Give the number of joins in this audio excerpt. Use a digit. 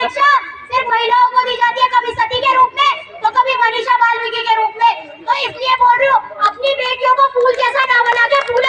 0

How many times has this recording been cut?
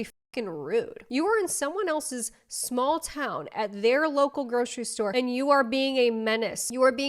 1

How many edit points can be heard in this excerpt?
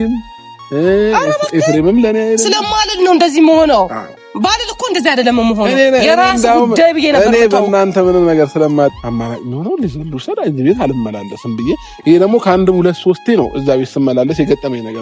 1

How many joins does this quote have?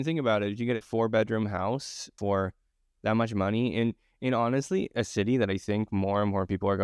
2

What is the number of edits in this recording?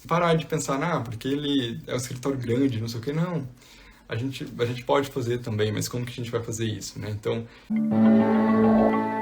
1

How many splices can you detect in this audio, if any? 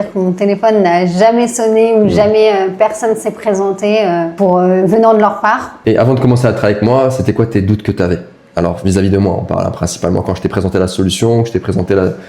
2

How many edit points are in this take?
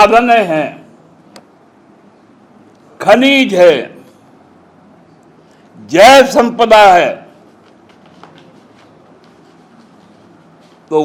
0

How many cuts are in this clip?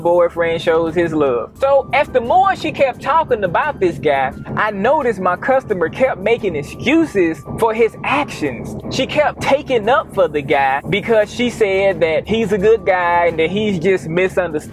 3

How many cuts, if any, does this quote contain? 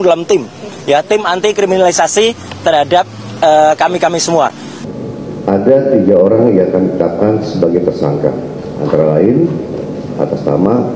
1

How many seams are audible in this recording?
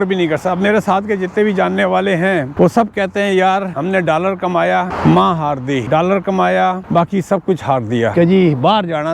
6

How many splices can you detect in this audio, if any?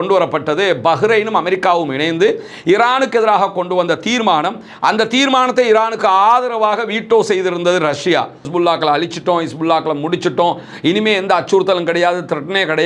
1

